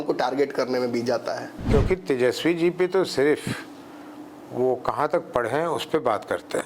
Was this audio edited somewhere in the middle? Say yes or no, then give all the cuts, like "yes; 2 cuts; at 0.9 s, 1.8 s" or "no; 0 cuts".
yes; 1 cut; at 1.5 s